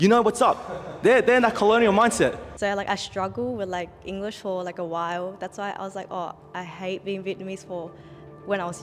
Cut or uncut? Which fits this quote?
cut